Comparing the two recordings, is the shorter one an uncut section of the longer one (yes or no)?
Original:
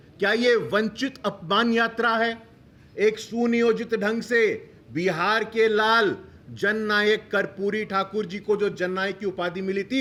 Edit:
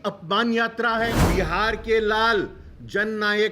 no